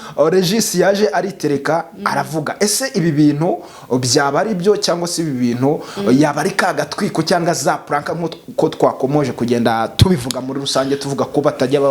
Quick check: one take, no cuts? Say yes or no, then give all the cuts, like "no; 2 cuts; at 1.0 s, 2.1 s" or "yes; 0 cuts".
yes; 0 cuts